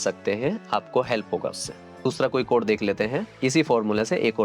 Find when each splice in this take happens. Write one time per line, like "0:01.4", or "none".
0:02.1